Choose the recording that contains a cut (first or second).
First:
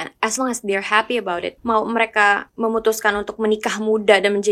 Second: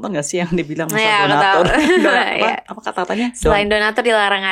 first